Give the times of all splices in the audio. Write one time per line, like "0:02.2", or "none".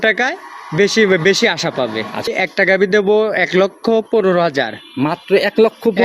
0:02.2